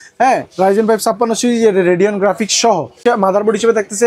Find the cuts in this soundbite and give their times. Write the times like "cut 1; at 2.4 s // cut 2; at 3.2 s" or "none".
cut 1; at 3.0 s